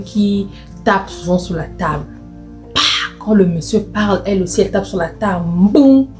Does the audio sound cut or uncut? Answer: uncut